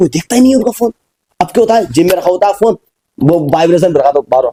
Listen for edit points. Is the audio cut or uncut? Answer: uncut